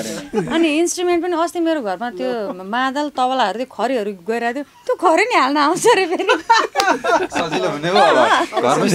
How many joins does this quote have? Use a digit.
0